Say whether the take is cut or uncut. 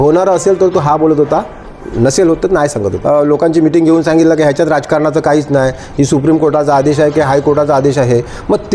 cut